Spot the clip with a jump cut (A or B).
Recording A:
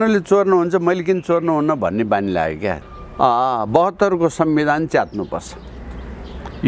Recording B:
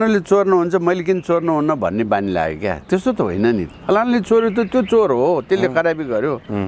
A